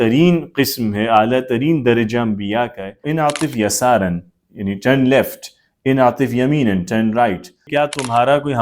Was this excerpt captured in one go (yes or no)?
no